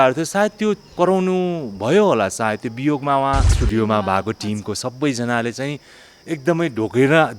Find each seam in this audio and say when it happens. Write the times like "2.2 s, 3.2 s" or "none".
0.9 s, 3.5 s